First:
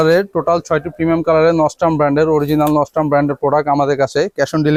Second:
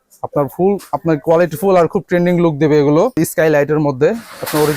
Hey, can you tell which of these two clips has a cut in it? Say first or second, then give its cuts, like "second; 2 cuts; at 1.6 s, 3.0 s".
second; 1 cut; at 3.2 s